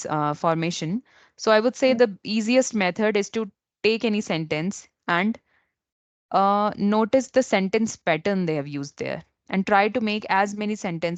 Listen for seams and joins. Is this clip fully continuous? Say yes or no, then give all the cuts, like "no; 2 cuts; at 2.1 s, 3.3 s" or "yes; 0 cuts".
yes; 0 cuts